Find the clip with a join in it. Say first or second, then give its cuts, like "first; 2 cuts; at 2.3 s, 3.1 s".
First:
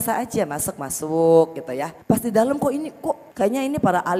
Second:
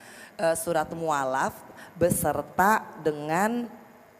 first; 2 cuts; at 2.0 s, 3.3 s